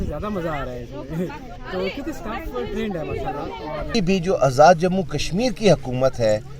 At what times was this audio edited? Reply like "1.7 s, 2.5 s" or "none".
4.1 s